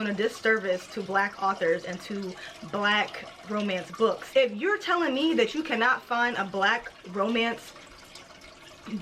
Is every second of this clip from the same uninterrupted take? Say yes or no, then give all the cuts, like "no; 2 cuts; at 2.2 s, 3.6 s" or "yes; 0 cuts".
no; 1 cut; at 4.2 s